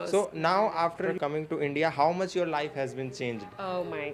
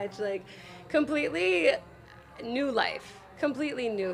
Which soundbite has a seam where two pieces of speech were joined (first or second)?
first